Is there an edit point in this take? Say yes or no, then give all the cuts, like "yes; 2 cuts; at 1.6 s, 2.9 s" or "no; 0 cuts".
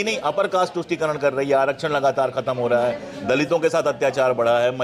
no; 0 cuts